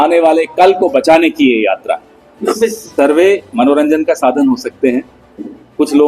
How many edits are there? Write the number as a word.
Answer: one